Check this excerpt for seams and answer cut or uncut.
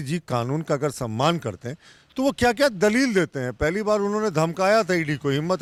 uncut